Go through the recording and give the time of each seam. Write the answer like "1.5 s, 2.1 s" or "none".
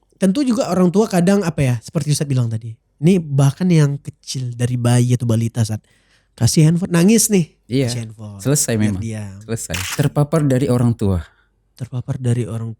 9.9 s